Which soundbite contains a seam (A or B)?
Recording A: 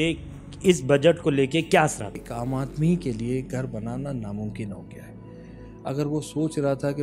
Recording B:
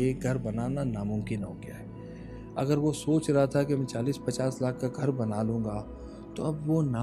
A